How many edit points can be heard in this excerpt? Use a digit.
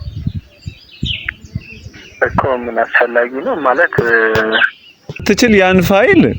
1